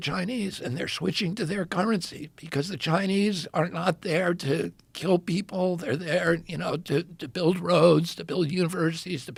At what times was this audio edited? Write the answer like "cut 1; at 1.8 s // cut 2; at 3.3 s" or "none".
none